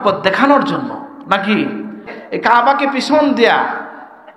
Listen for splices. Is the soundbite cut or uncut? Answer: cut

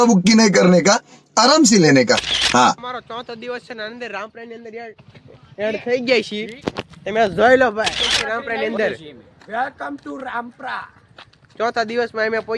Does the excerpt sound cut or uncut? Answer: cut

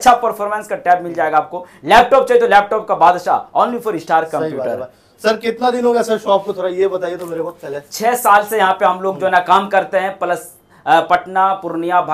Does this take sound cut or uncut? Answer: uncut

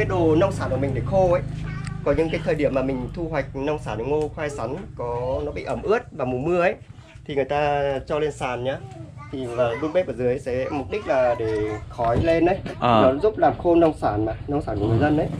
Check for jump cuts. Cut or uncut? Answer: uncut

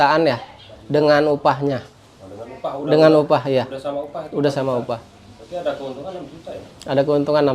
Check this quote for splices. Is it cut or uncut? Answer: uncut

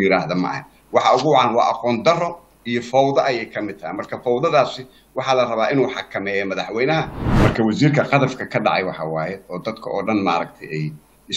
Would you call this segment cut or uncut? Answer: cut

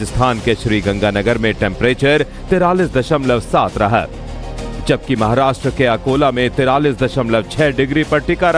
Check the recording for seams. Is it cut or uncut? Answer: cut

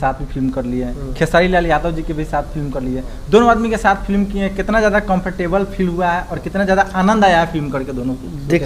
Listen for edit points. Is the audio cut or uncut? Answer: uncut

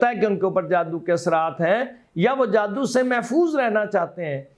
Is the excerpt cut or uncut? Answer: uncut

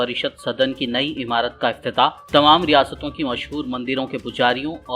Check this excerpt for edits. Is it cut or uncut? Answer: uncut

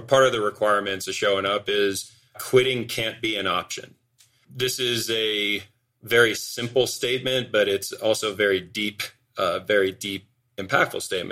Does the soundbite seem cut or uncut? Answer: cut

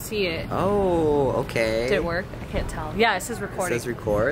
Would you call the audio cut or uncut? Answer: uncut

